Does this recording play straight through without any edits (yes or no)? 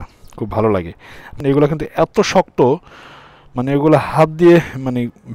no